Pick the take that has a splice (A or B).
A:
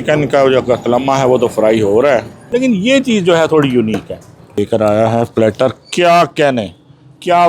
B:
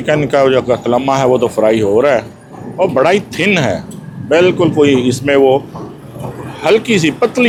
A